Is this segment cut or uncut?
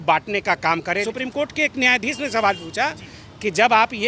cut